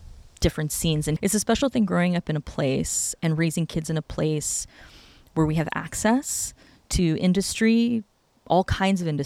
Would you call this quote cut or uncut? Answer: cut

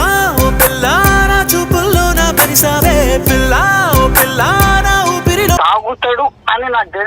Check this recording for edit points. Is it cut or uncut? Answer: cut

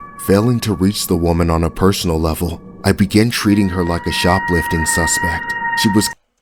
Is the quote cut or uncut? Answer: uncut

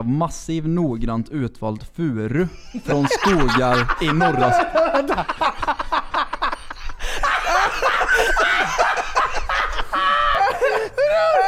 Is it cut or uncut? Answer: uncut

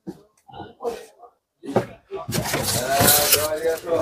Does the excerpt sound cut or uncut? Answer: uncut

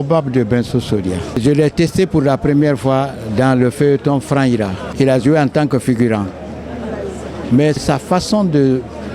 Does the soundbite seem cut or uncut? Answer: cut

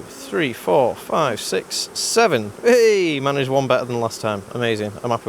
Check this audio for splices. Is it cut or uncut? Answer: uncut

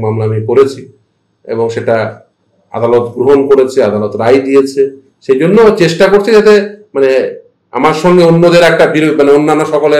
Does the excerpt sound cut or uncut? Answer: uncut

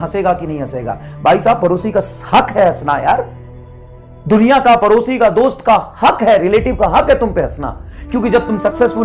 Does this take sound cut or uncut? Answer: uncut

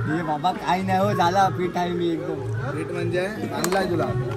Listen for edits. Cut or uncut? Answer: uncut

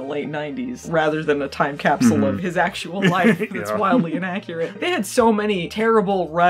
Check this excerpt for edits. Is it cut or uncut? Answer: uncut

